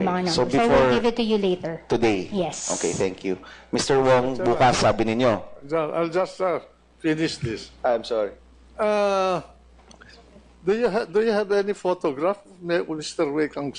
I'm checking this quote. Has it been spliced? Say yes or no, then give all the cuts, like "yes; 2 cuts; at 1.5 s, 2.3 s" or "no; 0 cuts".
yes; 1 cut; at 11.1 s